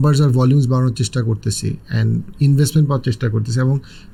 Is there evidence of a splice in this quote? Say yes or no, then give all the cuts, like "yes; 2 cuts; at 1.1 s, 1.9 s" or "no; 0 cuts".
no; 0 cuts